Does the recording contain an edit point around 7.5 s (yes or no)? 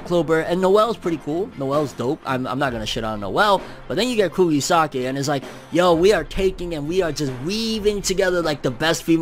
no